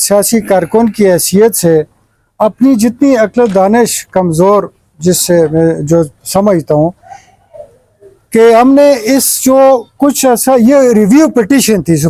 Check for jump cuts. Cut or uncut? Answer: uncut